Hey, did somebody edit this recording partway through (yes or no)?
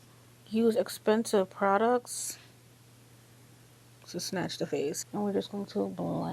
yes